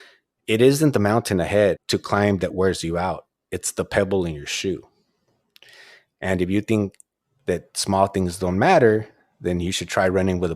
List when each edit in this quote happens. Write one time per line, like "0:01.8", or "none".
0:01.8